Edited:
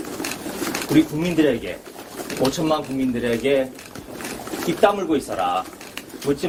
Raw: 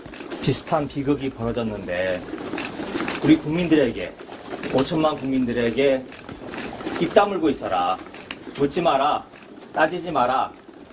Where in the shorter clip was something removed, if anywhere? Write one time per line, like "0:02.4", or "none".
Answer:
none